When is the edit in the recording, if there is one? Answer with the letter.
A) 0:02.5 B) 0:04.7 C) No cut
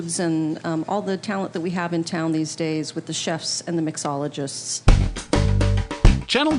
B